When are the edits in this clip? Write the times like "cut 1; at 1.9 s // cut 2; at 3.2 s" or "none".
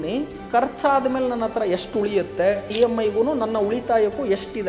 cut 1; at 2.7 s

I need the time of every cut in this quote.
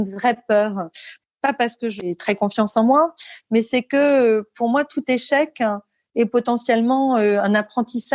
cut 1; at 1.1 s // cut 2; at 2.1 s

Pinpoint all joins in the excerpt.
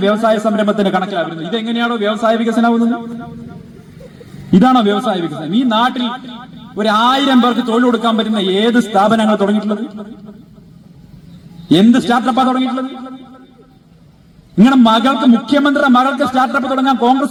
none

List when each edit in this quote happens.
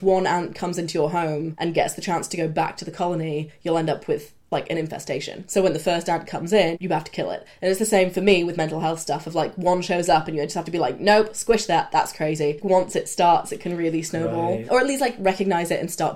cut 1; at 1.5 s // cut 2; at 5.4 s // cut 3; at 6.8 s // cut 4; at 12.6 s // cut 5; at 14.6 s

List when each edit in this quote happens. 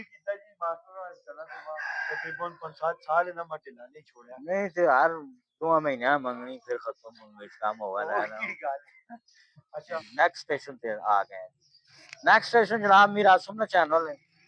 cut 1; at 9.9 s

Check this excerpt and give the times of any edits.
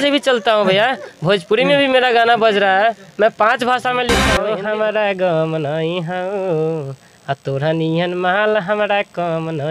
cut 1; at 4.3 s

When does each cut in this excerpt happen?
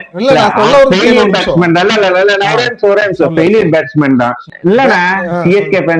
cut 1; at 4.5 s

